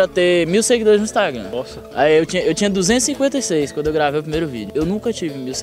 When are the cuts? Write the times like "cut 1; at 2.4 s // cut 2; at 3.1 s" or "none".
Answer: none